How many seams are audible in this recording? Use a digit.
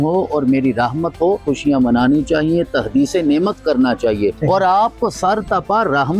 2